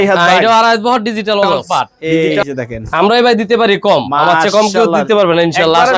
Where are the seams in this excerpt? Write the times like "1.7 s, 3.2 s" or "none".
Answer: 2.0 s